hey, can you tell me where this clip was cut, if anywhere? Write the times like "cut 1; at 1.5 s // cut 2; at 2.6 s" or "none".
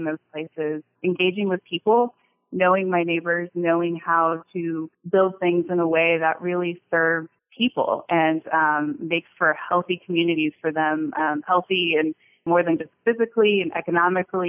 cut 1; at 0.9 s // cut 2; at 4.9 s // cut 3; at 7.4 s // cut 4; at 12.5 s